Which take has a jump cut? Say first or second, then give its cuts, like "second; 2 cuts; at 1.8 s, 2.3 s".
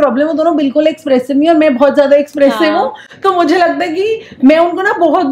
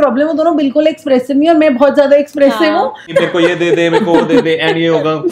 second; 1 cut; at 3.1 s